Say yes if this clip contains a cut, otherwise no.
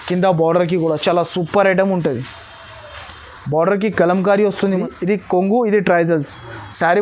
yes